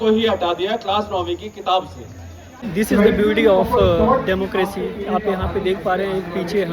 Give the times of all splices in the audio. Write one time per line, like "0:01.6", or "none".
0:02.5